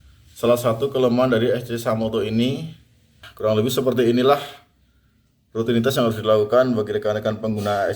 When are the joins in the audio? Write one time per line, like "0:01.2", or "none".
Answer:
0:03.3